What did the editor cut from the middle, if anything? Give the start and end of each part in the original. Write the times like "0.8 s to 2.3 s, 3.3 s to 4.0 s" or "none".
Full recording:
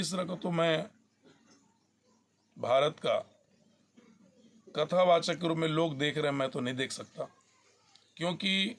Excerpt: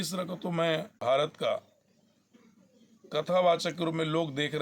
0.9 s to 2.6 s